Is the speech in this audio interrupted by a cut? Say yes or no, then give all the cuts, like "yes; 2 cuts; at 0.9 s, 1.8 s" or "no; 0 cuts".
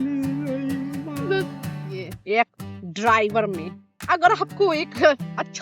yes; 1 cut; at 1.9 s